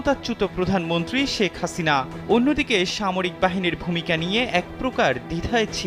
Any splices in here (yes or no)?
no